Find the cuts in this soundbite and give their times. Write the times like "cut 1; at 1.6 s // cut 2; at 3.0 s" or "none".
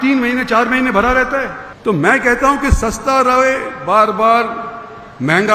cut 1; at 1.6 s